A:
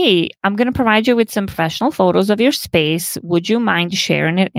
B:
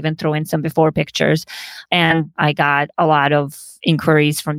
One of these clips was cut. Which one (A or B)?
B